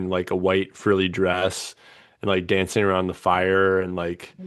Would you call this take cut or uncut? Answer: uncut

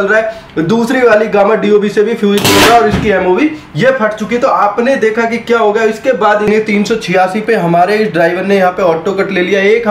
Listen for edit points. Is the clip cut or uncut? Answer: cut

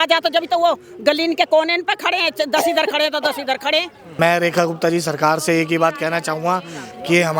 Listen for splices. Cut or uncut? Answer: cut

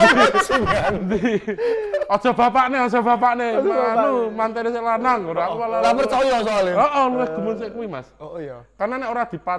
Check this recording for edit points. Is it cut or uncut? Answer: uncut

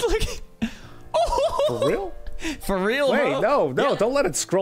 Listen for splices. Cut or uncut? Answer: uncut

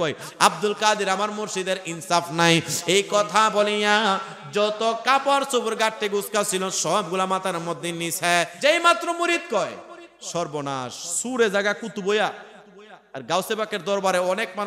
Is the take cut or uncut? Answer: cut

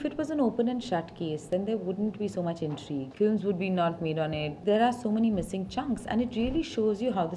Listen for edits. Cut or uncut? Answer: cut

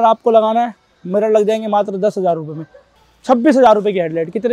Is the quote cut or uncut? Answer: cut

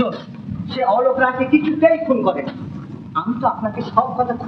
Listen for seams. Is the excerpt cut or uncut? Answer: uncut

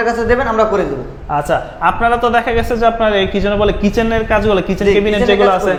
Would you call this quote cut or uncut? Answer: uncut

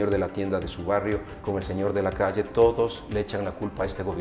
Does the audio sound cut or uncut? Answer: uncut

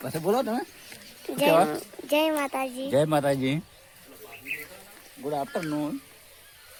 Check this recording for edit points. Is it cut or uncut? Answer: uncut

